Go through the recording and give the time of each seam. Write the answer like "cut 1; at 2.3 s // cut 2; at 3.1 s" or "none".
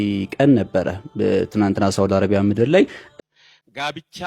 cut 1; at 3.0 s